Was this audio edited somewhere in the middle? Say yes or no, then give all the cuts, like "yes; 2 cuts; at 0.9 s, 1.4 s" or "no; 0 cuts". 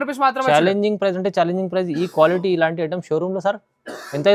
no; 0 cuts